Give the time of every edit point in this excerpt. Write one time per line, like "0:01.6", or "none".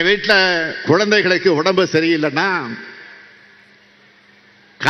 none